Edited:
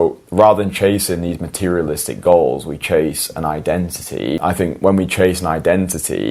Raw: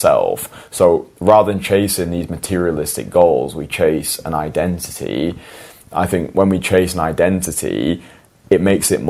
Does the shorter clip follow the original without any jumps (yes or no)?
no